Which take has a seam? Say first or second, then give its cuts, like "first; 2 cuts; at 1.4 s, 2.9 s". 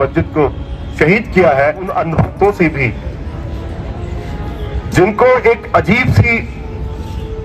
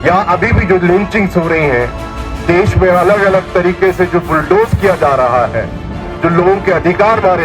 first; 1 cut; at 1.9 s